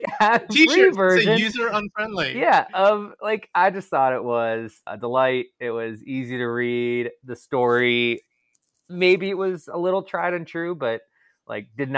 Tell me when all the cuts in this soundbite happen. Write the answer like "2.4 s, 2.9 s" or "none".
none